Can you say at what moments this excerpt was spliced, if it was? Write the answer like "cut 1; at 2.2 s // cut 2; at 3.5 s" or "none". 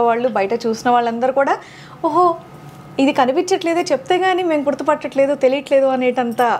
none